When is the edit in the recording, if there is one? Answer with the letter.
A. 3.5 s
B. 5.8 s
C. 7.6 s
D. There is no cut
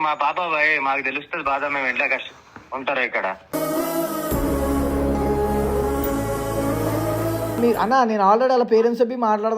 C